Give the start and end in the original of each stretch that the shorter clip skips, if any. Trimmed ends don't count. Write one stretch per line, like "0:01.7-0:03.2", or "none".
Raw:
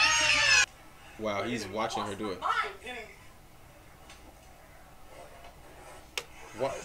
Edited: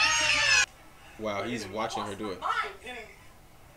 none